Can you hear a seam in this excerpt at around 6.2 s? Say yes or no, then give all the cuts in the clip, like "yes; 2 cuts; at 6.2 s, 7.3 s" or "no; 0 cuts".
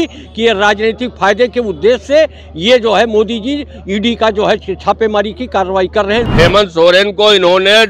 yes; 1 cut; at 6.2 s